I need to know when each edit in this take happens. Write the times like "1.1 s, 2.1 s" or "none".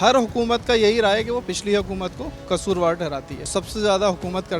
2.3 s, 3.6 s